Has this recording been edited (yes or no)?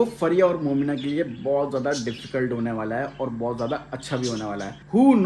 no